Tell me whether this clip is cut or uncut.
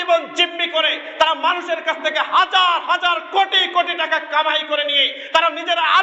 uncut